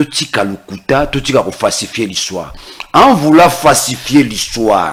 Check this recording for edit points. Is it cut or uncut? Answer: uncut